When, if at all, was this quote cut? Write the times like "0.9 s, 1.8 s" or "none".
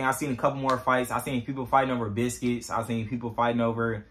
none